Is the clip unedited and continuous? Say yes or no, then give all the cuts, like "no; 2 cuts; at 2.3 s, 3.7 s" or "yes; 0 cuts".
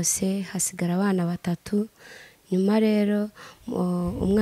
yes; 0 cuts